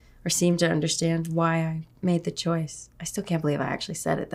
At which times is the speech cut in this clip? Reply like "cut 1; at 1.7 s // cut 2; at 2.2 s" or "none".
none